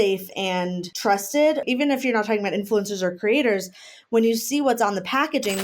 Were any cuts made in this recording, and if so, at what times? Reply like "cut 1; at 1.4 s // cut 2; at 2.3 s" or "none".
cut 1; at 0.9 s // cut 2; at 1.6 s